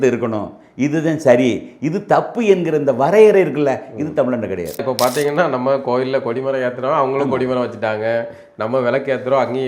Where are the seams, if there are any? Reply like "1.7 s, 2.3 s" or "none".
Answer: 4.8 s